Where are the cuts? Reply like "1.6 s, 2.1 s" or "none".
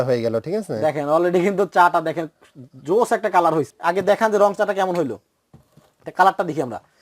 3.7 s

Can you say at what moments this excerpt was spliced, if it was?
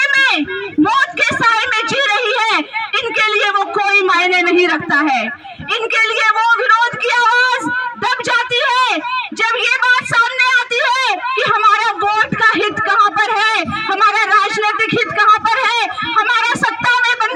none

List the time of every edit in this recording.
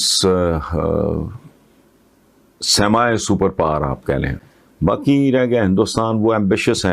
4.4 s

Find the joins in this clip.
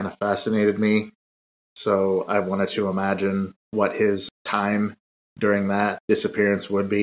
3.9 s, 6.0 s

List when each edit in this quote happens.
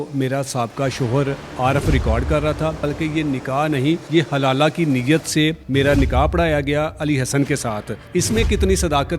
2.8 s, 4.0 s, 5.6 s, 7.9 s

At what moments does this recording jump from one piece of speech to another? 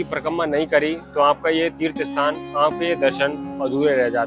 none

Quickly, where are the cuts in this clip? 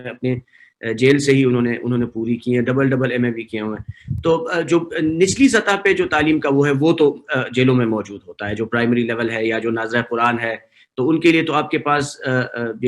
none

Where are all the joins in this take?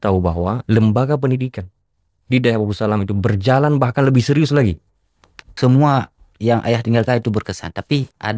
5.4 s

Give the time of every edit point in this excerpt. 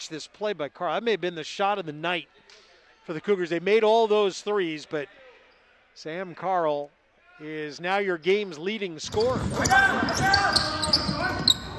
9.4 s

